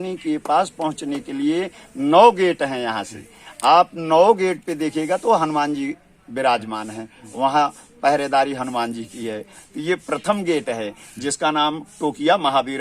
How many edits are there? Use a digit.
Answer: 0